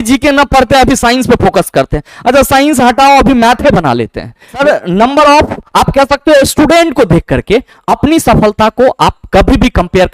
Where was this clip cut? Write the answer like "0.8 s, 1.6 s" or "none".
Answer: 4.6 s